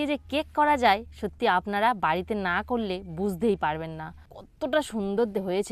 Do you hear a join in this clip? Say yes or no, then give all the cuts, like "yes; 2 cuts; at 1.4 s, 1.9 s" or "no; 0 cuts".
yes; 1 cut; at 4.4 s